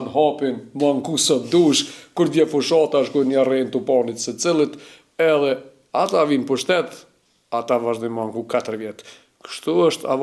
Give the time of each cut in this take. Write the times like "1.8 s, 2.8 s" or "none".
none